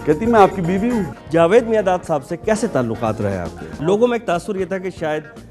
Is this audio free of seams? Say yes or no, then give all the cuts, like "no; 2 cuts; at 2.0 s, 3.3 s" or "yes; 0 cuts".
no; 2 cuts; at 1.1 s, 3.7 s